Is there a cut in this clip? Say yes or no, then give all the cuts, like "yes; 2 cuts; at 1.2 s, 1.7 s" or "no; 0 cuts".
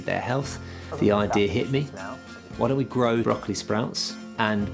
yes; 1 cut; at 3.2 s